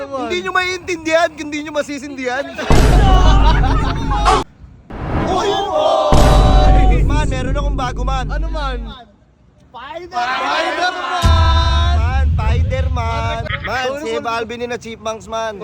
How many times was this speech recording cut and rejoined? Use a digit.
2